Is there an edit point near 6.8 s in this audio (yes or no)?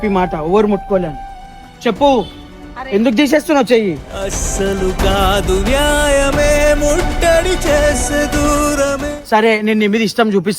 no